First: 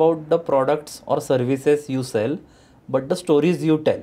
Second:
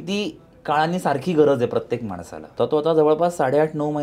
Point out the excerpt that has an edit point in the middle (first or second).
second